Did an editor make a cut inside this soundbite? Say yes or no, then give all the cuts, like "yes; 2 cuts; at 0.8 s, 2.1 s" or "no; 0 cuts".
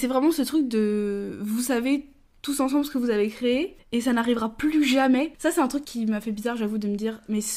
no; 0 cuts